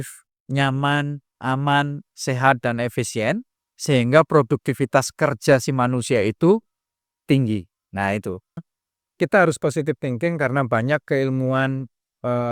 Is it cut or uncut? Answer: cut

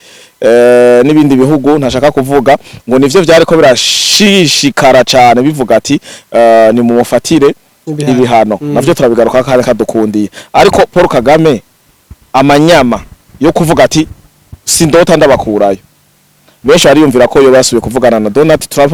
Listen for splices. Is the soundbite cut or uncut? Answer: uncut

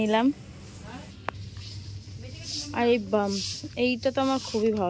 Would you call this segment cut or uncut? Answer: cut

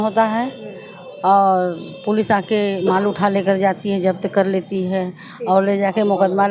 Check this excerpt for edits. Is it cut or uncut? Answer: uncut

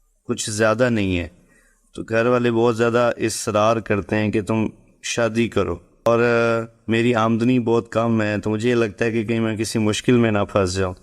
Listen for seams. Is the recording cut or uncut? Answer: cut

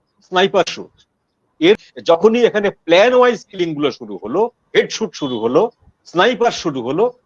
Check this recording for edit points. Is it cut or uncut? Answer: cut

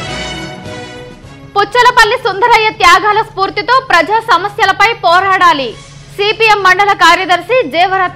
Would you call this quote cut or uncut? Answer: cut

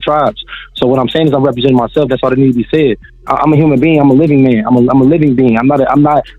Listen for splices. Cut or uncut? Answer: cut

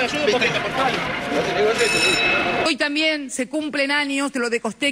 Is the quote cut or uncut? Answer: uncut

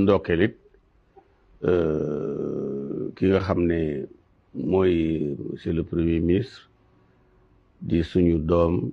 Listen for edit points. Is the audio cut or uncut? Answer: uncut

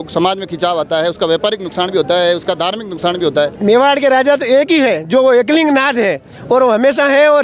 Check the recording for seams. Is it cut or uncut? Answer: cut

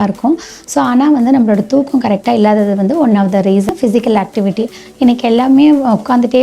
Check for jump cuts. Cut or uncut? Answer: cut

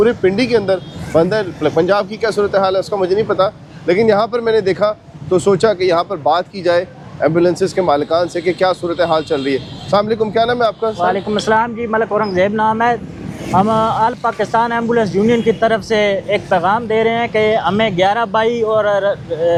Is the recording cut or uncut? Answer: uncut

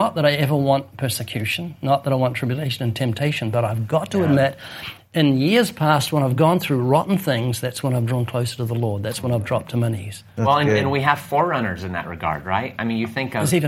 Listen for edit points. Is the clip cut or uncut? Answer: uncut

